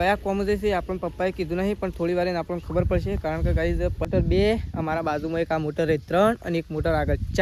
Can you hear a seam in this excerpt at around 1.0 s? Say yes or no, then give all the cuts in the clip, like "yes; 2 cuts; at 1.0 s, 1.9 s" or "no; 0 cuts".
no; 1 cut; at 4.1 s